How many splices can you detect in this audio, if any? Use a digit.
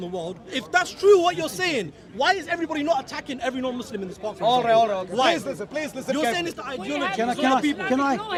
0